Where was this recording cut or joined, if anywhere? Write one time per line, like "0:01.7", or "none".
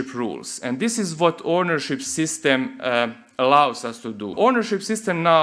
0:04.3

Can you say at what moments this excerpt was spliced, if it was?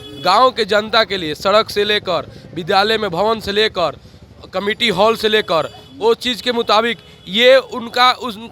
none

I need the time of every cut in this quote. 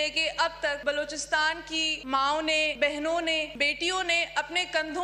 0:00.8
0:02.0
0:02.7
0:03.5

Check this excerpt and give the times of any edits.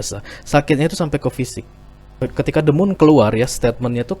0:02.2

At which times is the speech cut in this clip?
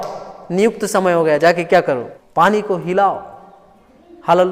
0:02.2

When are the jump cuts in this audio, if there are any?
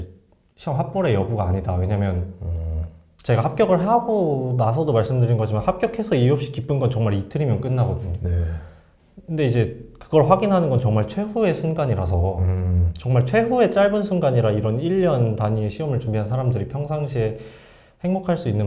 none

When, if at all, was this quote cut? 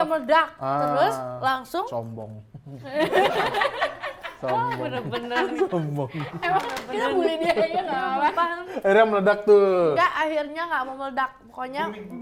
none

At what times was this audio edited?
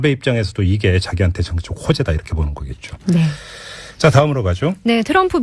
0:03.9

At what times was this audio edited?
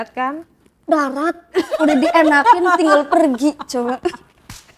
none

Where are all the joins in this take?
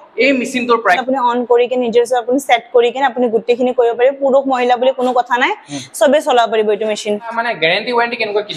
0:01.0
0:07.4

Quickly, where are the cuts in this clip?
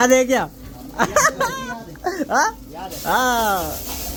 none

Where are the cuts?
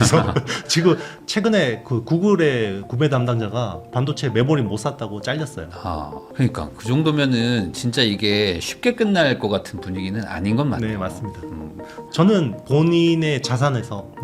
0:01.1
0:11.9

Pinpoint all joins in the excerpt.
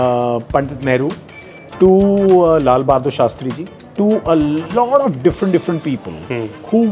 none

